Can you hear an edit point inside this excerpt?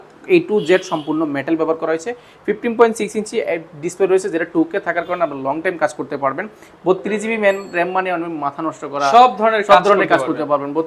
no; 0 cuts

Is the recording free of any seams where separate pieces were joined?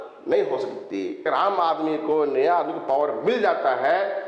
no; 1 cut; at 1.2 s

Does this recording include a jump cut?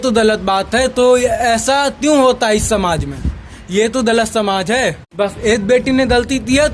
yes; 1 cut; at 5.0 s

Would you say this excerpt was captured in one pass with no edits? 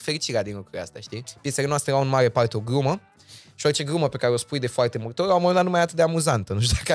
no; 1 cut; at 1.3 s

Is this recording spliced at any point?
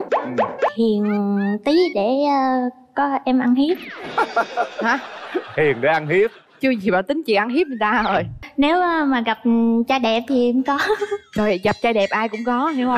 yes; 1 cut; at 8.4 s

